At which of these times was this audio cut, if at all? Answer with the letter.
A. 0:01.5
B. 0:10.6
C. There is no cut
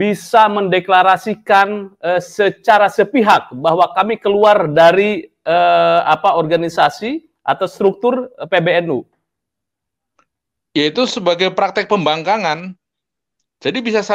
C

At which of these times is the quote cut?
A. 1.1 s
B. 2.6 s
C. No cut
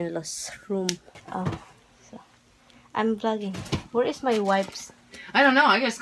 A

